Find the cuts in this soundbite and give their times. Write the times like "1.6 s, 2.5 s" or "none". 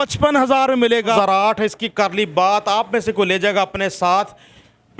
1.2 s